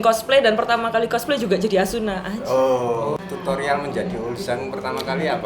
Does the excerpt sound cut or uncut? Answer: cut